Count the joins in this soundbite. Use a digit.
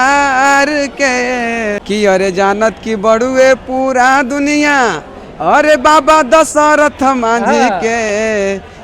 1